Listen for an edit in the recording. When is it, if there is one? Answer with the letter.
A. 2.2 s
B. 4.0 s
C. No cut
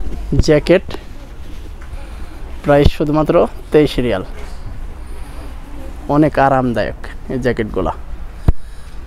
C